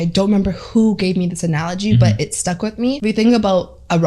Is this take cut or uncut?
cut